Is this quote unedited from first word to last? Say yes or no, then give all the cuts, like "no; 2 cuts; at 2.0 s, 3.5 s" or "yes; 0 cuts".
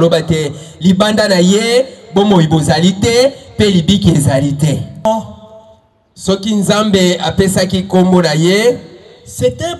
no; 1 cut; at 5.0 s